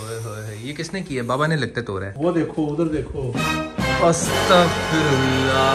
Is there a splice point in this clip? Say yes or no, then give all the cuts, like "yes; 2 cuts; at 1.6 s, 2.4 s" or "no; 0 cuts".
no; 0 cuts